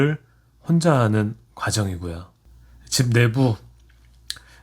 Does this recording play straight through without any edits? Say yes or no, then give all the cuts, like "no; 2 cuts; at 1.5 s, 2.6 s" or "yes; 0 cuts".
yes; 0 cuts